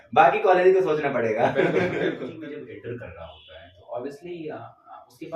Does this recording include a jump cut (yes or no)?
yes